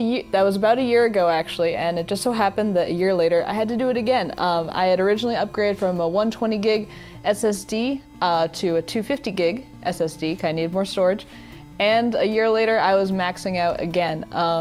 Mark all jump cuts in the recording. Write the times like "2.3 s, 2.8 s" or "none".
13.4 s